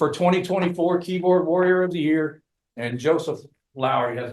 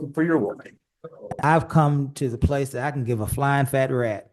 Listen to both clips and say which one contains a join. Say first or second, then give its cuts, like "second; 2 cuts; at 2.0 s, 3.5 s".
second; 1 cut; at 1.3 s